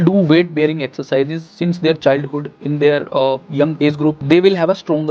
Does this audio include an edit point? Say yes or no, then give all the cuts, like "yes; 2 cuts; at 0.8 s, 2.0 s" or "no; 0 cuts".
yes; 1 cut; at 3.7 s